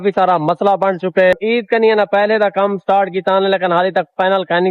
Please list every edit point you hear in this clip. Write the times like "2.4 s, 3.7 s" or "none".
1.4 s